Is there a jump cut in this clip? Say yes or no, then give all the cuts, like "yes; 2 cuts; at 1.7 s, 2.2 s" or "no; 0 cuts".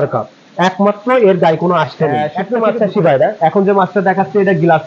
yes; 1 cut; at 2.4 s